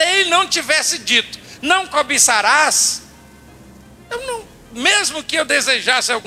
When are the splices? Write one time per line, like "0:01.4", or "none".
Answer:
none